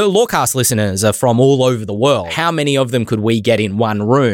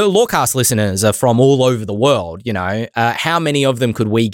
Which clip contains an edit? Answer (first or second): first